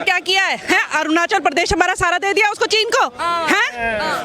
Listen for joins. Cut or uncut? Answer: uncut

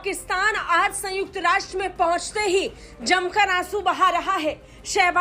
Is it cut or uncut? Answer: uncut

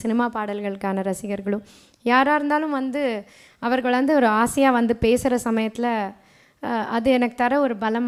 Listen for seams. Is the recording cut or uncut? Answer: uncut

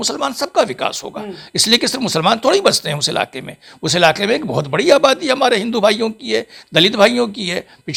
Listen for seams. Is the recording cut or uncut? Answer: uncut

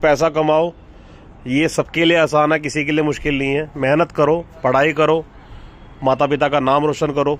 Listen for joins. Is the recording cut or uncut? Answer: uncut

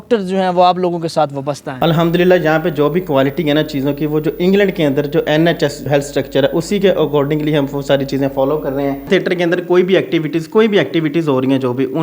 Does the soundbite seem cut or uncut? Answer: cut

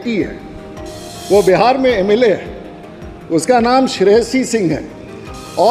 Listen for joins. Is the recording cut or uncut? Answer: uncut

